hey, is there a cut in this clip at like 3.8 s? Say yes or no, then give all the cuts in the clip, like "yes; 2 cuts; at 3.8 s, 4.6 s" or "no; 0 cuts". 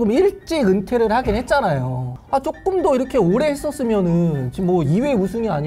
no; 1 cut; at 2.1 s